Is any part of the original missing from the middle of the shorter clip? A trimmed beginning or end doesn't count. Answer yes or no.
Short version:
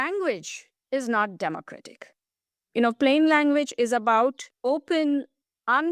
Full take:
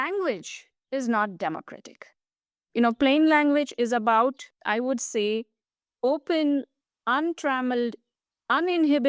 yes